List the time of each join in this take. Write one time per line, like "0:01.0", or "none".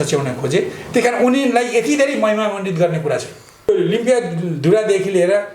0:03.7